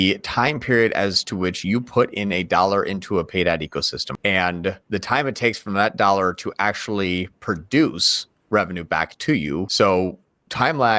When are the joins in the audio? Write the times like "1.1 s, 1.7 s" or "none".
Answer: 4.0 s, 4.8 s, 9.7 s